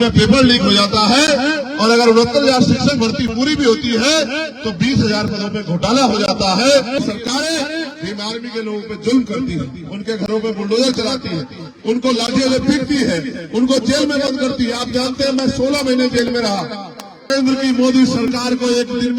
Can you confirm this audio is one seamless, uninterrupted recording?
no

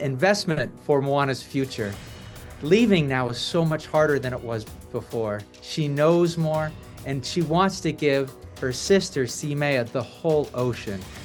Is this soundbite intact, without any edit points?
yes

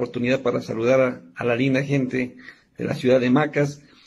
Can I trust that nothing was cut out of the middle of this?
yes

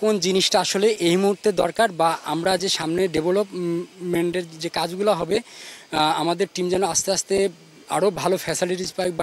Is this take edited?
no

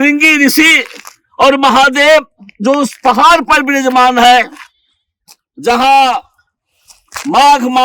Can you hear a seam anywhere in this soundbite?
no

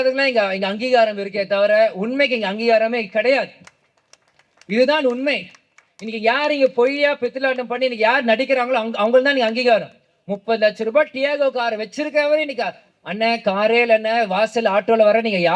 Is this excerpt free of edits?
yes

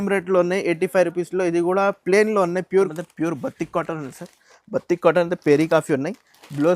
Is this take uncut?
no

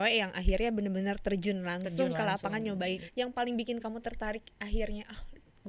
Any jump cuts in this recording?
yes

